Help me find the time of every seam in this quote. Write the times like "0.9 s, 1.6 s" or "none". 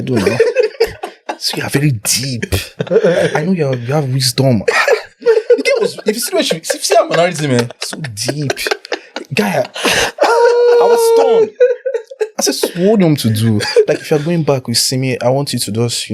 none